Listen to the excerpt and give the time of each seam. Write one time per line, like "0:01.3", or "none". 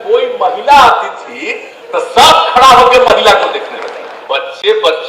0:04.1

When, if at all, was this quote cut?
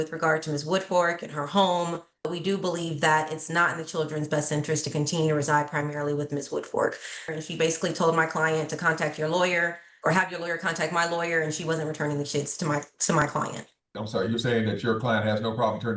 0:02.3
0:07.2
0:13.9

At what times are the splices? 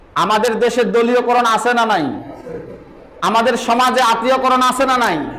none

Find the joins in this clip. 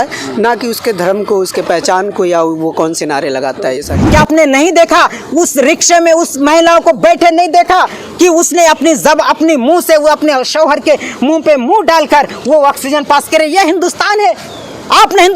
0:04.0

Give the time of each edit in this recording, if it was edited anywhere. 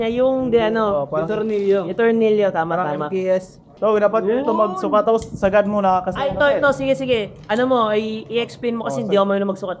0:03.6

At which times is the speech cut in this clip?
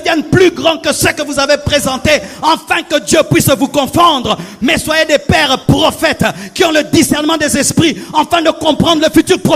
none

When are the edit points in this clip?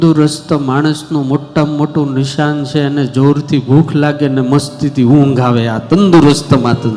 none

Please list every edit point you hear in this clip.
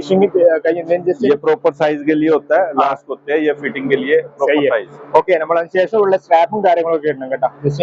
none

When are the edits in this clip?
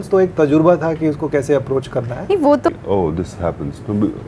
0:02.7

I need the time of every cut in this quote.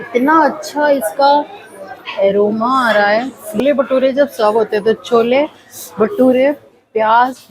0:03.6

